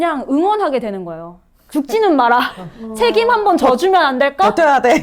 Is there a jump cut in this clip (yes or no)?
no